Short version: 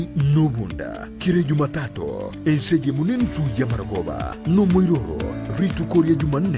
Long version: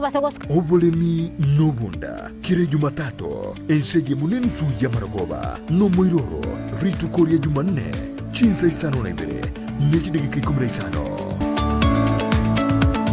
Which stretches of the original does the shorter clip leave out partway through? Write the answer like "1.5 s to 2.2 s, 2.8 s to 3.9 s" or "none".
none